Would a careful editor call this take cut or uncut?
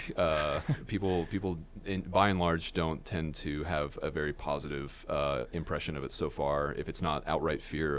uncut